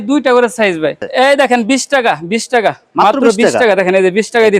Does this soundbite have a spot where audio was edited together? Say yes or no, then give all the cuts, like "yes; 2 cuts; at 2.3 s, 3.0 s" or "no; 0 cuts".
yes; 1 cut; at 1.0 s